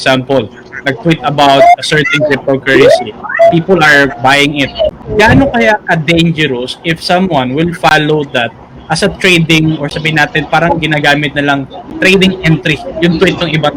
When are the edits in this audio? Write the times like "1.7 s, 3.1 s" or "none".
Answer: 5.0 s, 12.9 s